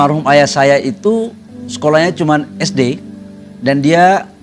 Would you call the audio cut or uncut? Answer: uncut